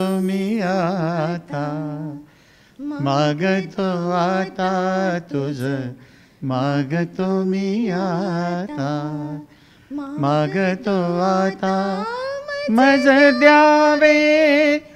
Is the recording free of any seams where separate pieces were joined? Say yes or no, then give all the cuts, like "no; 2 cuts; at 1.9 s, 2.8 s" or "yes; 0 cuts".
yes; 0 cuts